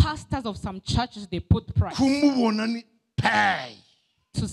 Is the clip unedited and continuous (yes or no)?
yes